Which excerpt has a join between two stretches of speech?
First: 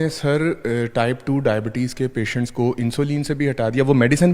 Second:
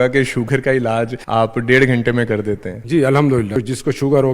second; 3 cuts; at 1.2 s, 2.7 s, 3.6 s

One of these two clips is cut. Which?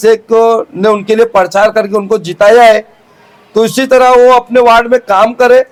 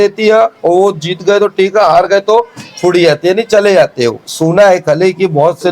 second; 1 cut; at 4.2 s

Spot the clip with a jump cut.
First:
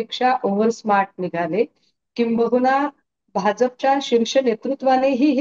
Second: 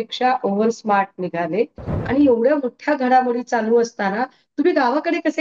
second; 1 cut; at 2.0 s

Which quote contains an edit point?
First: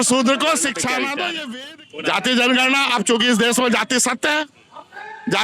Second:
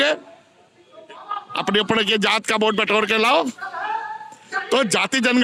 first; 1 cut; at 1.4 s

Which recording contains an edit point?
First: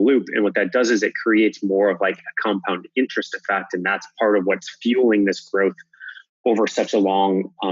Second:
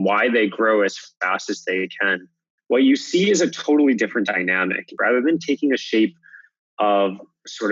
second; 1 cut; at 5.0 s

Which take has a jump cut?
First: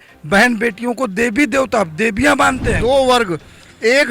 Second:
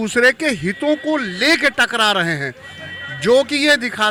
first; 1 cut; at 2.8 s

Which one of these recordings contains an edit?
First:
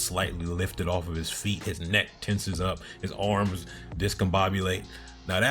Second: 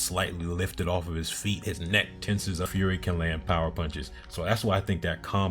second; 1 cut; at 2.7 s

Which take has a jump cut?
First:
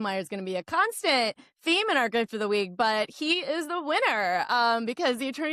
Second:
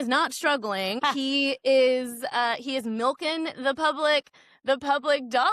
second; 1 cut; at 1.0 s

